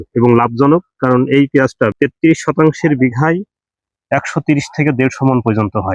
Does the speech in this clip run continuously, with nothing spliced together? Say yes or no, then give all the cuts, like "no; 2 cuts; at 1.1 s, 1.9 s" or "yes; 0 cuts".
no; 1 cut; at 1.9 s